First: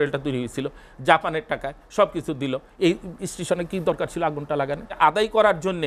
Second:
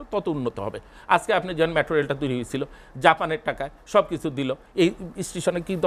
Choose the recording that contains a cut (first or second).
first